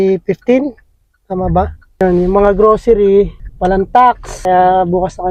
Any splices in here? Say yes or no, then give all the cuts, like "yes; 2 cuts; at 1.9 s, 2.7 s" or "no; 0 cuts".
no; 0 cuts